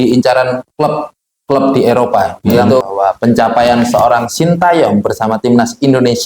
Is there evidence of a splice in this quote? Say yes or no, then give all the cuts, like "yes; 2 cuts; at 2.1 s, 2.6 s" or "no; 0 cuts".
yes; 1 cut; at 2.8 s